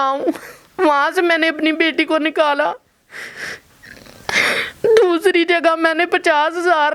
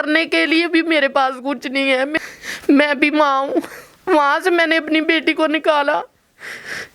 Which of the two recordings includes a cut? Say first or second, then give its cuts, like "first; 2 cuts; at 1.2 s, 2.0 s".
second; 1 cut; at 2.1 s